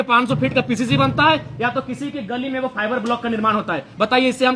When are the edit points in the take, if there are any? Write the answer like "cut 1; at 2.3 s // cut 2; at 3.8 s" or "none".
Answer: none